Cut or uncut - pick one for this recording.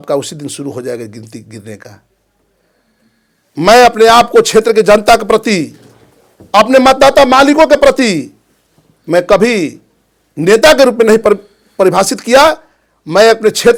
uncut